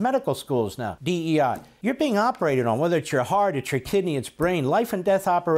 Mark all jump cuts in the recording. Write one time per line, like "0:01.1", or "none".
0:00.9
0:01.7